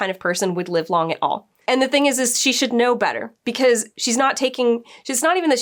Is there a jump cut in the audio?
no; 0 cuts

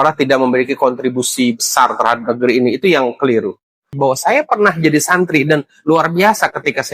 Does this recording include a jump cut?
yes; 1 cut; at 3.9 s

